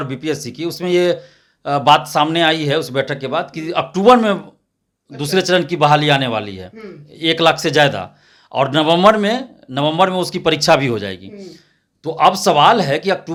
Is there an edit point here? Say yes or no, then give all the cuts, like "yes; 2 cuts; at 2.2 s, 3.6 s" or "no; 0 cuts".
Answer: no; 0 cuts